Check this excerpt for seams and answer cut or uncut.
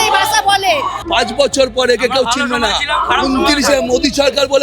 cut